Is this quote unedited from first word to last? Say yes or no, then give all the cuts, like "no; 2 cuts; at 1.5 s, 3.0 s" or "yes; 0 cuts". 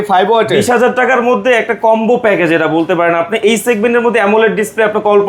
yes; 0 cuts